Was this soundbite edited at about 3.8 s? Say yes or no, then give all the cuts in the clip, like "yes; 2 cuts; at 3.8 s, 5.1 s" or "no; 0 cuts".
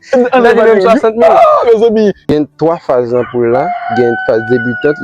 no; 1 cut; at 2.3 s